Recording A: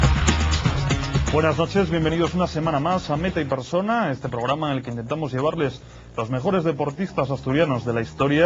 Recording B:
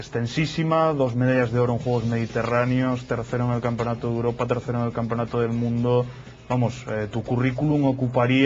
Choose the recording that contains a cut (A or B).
B